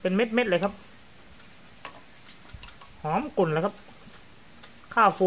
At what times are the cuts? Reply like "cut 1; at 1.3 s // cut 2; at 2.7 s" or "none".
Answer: none